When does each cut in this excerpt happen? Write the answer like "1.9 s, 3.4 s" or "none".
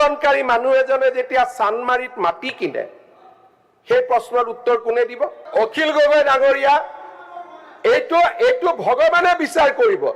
5.4 s

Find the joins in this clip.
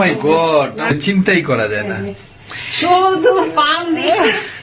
0.9 s

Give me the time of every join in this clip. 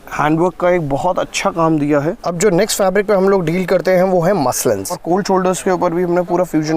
2.2 s, 5.0 s

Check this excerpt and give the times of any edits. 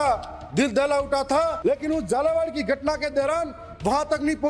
1.6 s

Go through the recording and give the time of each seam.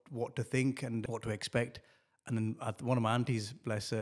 1.0 s

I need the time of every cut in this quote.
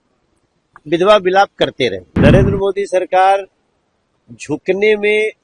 2.1 s

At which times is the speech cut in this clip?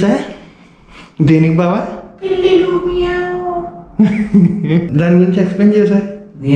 4.9 s

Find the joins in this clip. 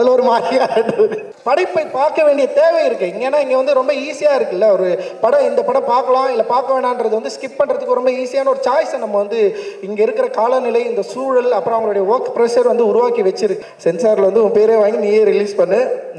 1.3 s, 13.7 s

